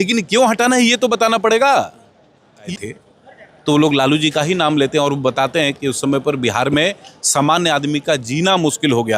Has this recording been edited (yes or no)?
yes